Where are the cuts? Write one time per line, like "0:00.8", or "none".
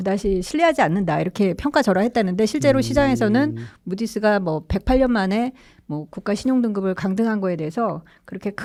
none